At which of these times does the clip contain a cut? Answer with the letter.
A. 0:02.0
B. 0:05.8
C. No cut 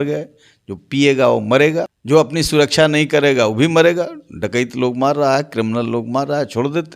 A